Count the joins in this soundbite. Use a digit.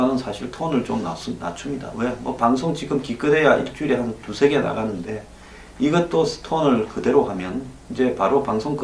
1